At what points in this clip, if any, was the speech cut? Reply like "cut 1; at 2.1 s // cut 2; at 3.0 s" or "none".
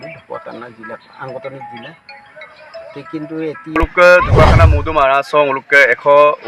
cut 1; at 3.8 s